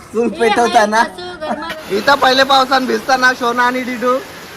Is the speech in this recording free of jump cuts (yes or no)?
no